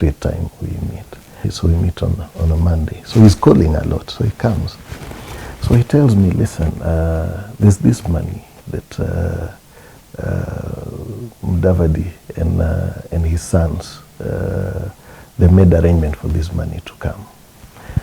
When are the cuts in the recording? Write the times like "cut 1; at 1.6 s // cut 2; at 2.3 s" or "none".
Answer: cut 1; at 1.5 s